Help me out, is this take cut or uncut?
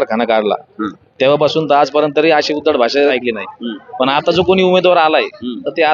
cut